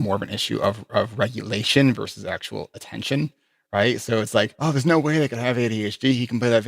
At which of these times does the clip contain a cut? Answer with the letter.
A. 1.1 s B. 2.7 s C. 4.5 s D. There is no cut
C